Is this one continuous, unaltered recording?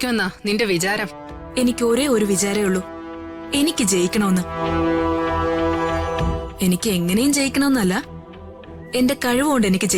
yes; 0 cuts

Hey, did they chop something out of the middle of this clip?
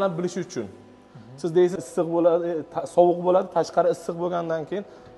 yes; 1 cut; at 1.8 s

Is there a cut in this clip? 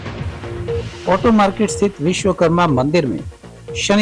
yes; 1 cut; at 1.0 s

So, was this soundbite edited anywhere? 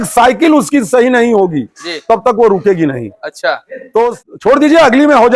yes; 1 cut; at 4.1 s

